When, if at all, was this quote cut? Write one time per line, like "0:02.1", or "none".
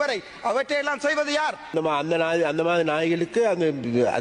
0:01.6